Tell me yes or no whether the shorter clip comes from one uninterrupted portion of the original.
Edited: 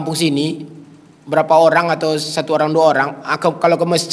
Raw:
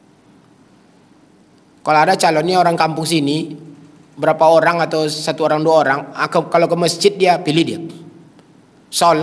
yes